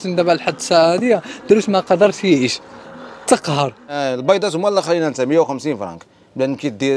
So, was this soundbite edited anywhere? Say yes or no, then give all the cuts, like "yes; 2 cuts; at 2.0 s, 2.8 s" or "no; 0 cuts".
yes; 1 cut; at 4.0 s